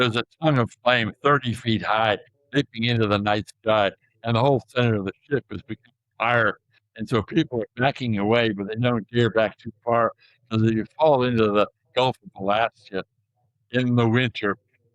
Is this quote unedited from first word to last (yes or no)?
yes